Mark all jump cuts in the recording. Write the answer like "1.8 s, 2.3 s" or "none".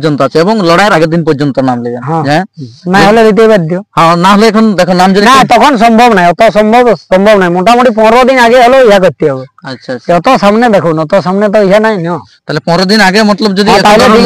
none